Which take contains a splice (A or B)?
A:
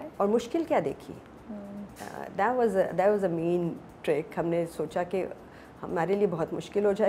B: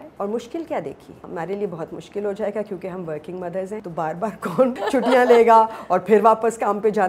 B